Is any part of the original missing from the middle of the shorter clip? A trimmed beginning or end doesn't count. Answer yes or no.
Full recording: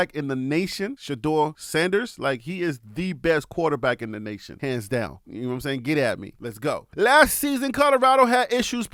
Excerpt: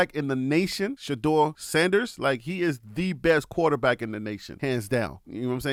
no